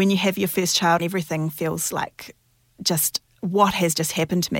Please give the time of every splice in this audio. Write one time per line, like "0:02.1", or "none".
0:01.0